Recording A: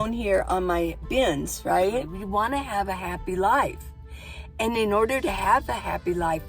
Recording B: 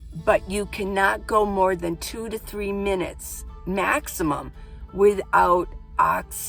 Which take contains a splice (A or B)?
A